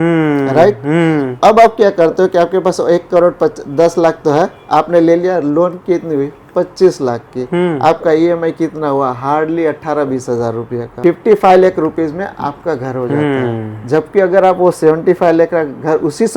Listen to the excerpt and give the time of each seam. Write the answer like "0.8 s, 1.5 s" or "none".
11.0 s